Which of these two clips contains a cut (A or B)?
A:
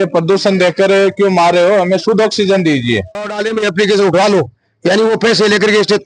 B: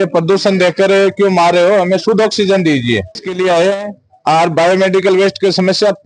A